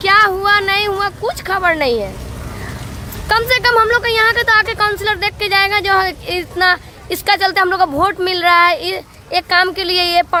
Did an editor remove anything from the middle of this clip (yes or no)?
no